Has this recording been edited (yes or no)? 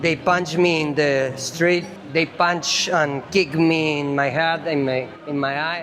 yes